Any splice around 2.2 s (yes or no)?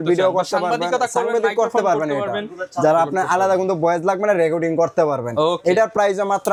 no